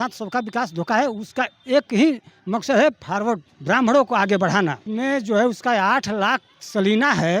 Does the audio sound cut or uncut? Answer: cut